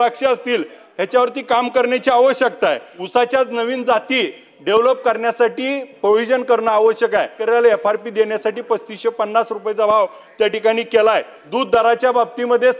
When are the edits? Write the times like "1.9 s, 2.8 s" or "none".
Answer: 2.9 s, 7.4 s, 11.4 s